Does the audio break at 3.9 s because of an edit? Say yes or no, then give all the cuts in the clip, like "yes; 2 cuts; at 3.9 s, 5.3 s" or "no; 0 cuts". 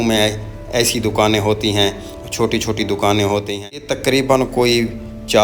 yes; 1 cut; at 3.9 s